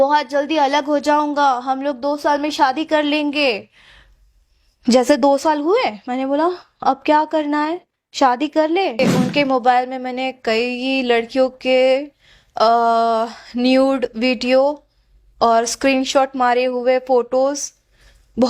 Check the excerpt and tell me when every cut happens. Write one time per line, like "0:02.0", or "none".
0:09.0